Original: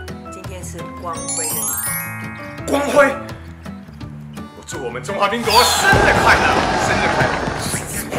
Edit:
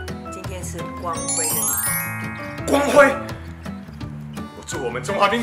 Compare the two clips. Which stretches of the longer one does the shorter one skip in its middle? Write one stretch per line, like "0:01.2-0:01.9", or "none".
none